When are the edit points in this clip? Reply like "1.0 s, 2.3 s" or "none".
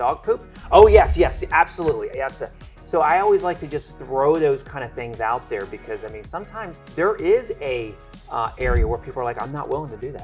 6.8 s